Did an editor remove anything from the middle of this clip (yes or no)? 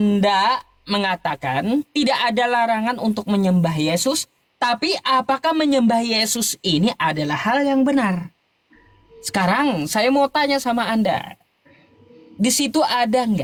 no